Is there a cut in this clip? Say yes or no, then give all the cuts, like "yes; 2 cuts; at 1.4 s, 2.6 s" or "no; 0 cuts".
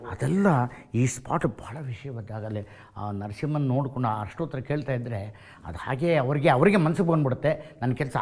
no; 0 cuts